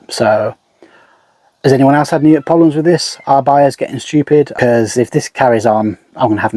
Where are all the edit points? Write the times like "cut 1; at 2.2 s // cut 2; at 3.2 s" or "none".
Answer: cut 1; at 4.5 s